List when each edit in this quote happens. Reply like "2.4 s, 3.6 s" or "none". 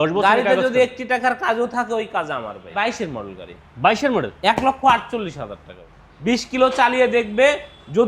2.7 s, 6.3 s